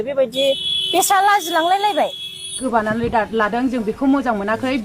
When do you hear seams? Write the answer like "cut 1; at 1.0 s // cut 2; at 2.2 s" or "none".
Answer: cut 1; at 2.6 s